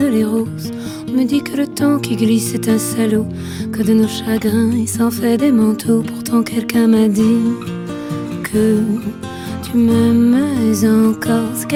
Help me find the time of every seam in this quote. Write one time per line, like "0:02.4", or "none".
none